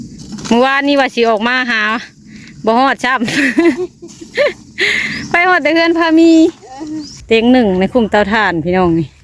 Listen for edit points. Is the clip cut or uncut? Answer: cut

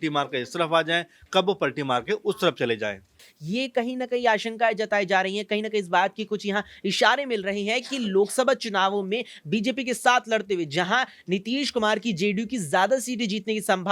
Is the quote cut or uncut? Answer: cut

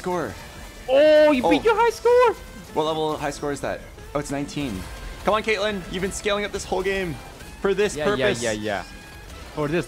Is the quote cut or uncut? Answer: uncut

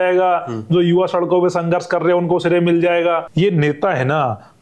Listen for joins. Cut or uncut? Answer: cut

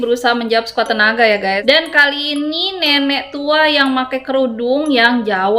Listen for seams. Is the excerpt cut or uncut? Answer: cut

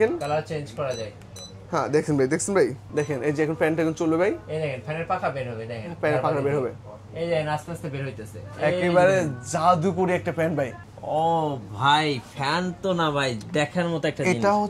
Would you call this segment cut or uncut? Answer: cut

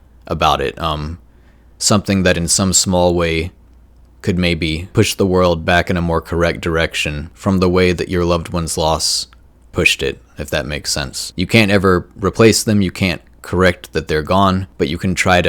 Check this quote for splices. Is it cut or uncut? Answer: cut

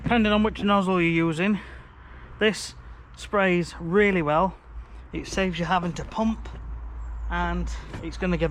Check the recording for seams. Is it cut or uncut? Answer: uncut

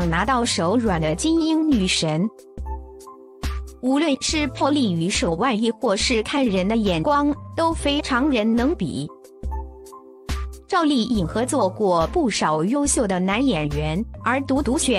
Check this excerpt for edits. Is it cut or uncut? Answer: cut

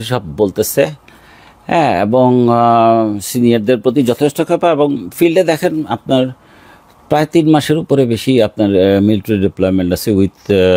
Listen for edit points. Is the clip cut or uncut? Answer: uncut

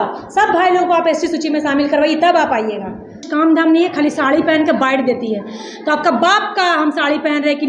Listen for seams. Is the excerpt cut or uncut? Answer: cut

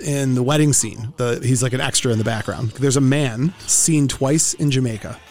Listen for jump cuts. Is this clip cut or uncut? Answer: cut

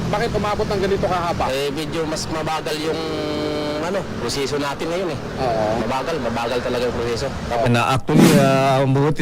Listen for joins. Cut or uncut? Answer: cut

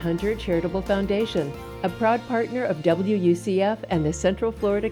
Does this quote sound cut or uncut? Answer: uncut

